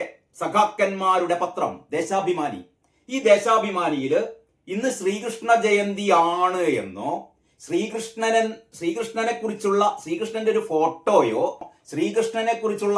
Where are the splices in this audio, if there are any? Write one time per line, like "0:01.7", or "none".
0:11.8